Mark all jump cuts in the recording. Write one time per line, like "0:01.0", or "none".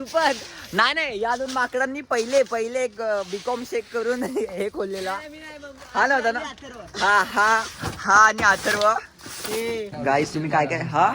0:09.9